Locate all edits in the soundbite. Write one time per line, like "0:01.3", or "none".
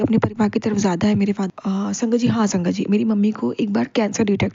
0:01.5